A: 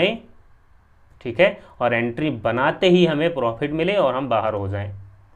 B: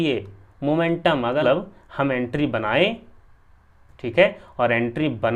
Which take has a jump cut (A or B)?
B